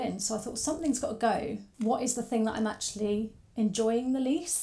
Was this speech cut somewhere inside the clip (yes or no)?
yes